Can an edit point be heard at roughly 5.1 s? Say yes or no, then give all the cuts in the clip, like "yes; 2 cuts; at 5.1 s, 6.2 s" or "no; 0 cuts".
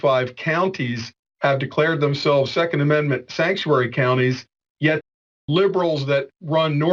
yes; 1 cut; at 5.1 s